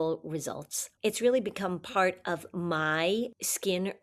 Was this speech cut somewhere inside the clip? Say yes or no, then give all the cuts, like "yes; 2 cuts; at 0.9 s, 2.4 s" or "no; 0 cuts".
no; 0 cuts